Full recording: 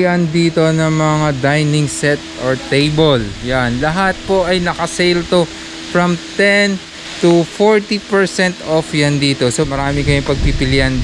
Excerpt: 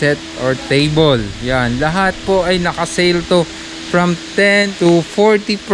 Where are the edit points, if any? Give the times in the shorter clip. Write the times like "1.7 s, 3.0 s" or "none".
4.7 s